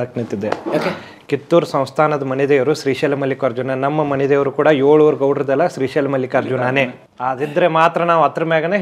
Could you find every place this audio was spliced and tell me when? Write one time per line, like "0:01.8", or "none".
0:07.1